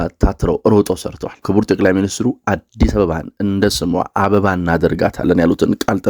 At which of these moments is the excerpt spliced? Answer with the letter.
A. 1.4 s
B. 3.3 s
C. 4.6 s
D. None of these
A